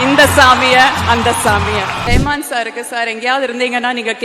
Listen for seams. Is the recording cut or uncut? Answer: cut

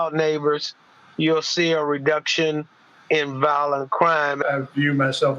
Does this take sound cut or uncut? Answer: cut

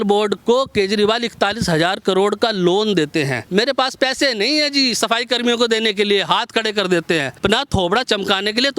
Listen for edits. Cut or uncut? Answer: cut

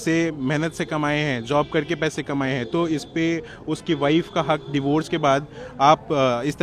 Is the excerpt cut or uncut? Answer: uncut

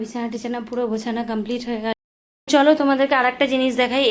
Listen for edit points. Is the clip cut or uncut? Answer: cut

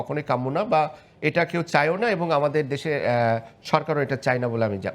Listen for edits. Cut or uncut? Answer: uncut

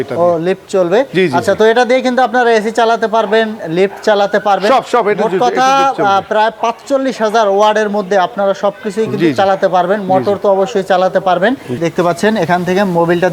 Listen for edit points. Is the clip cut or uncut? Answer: cut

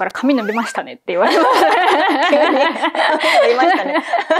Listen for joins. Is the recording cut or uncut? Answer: uncut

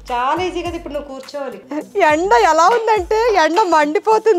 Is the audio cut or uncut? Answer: cut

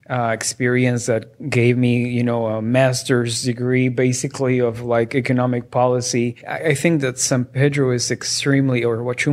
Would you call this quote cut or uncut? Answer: cut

